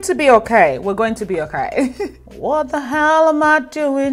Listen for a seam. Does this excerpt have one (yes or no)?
yes